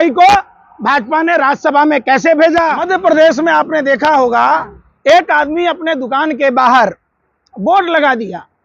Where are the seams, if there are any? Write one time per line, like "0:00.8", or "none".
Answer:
0:02.8